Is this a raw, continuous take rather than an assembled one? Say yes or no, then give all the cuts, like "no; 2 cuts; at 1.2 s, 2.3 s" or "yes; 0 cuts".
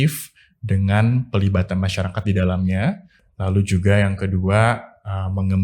yes; 0 cuts